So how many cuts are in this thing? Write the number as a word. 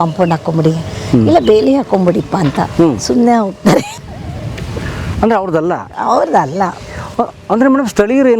zero